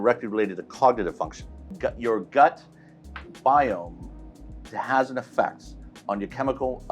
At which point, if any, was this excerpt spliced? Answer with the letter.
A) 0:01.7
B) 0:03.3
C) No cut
A